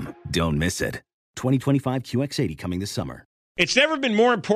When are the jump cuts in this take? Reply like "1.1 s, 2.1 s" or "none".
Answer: 3.4 s